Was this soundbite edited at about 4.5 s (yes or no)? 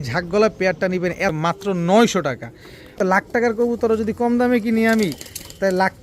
no